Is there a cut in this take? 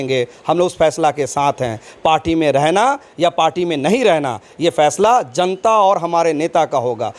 no; 0 cuts

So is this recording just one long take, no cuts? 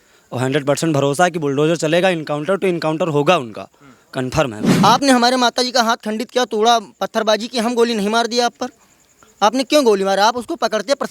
no; 1 cut; at 4.7 s

